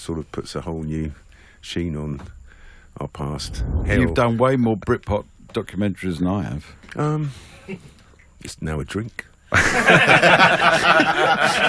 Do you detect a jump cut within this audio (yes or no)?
yes